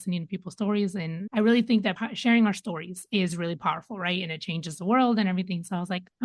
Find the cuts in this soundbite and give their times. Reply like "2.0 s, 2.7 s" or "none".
1.1 s, 2.0 s